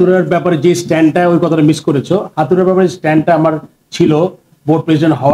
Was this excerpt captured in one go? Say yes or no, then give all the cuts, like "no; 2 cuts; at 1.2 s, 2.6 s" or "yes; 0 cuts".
yes; 0 cuts